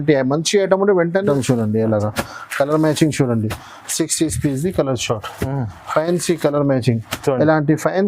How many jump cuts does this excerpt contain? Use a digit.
1